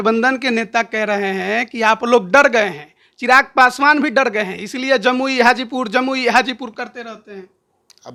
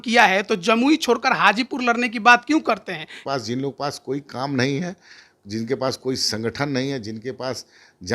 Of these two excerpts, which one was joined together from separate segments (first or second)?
second